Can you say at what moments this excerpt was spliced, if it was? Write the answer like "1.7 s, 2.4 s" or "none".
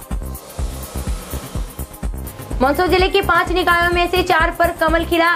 none